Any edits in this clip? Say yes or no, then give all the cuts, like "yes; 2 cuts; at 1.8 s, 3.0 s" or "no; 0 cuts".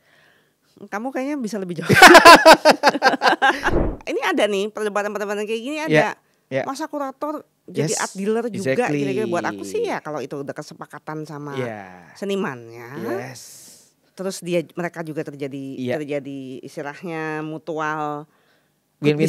yes; 1 cut; at 3.7 s